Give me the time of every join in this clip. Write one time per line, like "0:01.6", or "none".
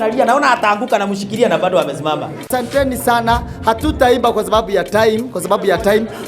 0:02.4